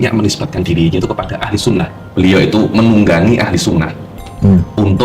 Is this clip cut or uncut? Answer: cut